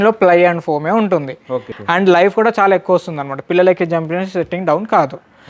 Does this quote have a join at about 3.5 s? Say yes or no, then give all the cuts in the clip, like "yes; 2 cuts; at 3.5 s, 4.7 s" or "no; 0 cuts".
no; 1 cut; at 1.7 s